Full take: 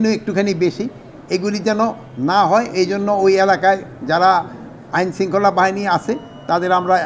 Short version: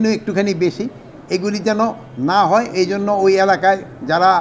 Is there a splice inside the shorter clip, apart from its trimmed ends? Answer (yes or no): no